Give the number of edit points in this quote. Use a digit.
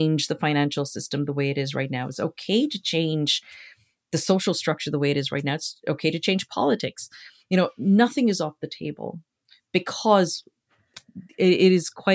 0